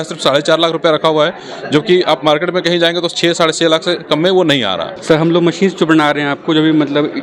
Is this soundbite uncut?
yes; 0 cuts

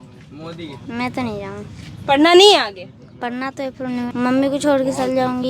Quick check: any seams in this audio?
yes; 1 cut; at 4.1 s

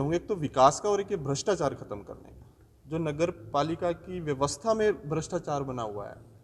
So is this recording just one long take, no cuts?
yes; 0 cuts

